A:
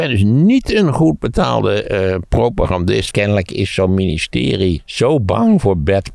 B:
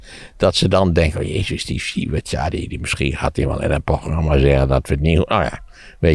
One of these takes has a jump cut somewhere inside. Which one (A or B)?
A